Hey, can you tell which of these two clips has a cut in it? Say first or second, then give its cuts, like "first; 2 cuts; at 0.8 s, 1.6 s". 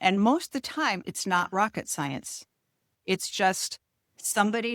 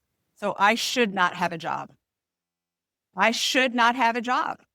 first; 2 cuts; at 1.0 s, 2.9 s